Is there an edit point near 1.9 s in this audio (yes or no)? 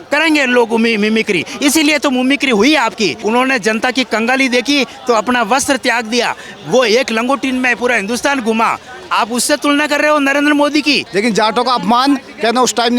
no